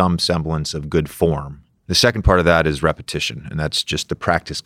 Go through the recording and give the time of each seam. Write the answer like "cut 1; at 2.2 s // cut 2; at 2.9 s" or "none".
none